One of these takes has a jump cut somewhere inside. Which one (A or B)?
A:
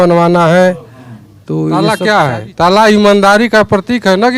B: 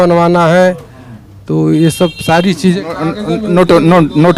A